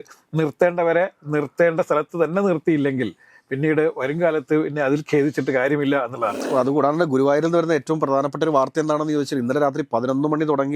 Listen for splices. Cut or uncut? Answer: cut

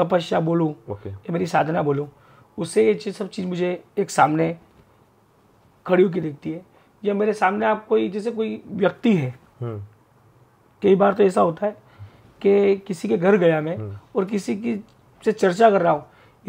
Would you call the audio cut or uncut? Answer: uncut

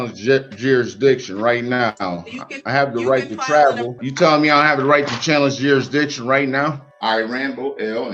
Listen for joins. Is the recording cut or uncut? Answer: cut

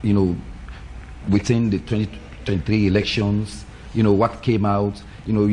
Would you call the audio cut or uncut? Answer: uncut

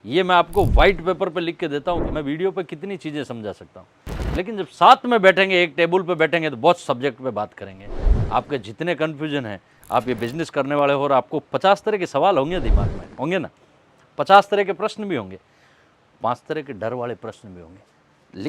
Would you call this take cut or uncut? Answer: cut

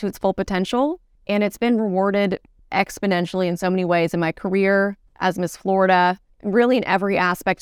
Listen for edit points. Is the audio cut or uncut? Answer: cut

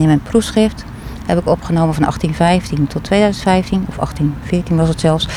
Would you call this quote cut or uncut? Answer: uncut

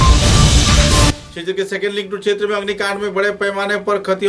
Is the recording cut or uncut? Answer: cut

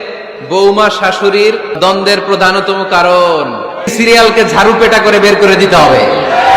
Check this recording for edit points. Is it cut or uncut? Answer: cut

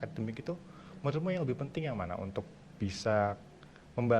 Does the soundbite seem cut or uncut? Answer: uncut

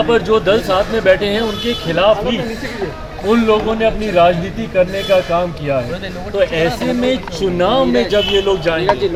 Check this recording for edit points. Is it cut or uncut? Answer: uncut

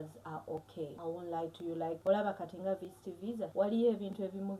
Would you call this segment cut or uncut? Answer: cut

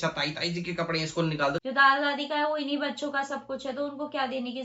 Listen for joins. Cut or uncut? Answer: cut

